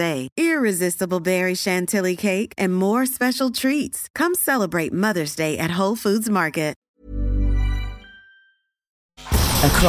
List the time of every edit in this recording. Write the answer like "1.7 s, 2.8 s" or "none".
6.8 s, 9.0 s